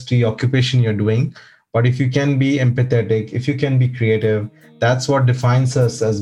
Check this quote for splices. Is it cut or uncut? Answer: uncut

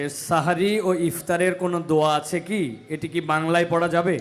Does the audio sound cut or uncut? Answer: uncut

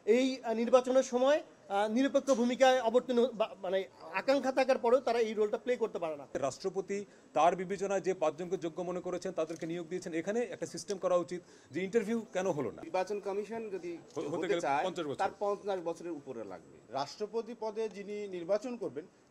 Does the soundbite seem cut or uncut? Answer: cut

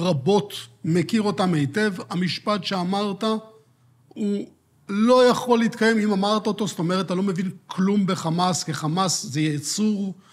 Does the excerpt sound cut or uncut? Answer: uncut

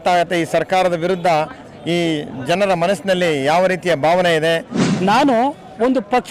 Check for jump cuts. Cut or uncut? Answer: cut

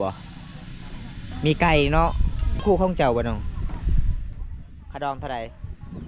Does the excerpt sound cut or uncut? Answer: cut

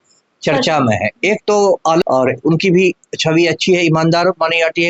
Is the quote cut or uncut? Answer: cut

